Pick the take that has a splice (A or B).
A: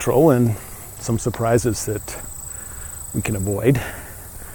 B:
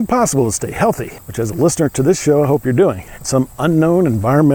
B